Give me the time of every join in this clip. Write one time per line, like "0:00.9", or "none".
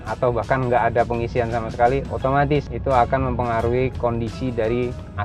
none